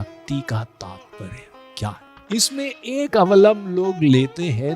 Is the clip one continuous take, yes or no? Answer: no